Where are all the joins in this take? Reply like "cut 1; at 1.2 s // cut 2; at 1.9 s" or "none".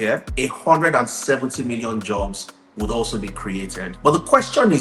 cut 1; at 3.9 s